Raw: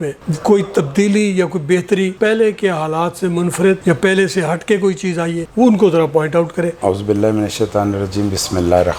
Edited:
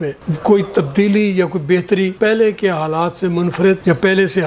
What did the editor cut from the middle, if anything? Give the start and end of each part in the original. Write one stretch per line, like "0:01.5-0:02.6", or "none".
none